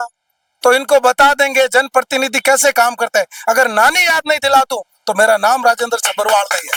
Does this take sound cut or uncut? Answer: uncut